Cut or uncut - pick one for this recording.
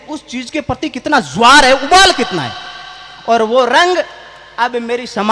uncut